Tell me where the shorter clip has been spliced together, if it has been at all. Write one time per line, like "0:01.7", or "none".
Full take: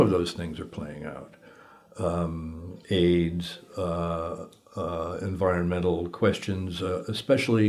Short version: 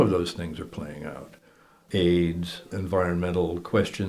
0:01.7
0:02.7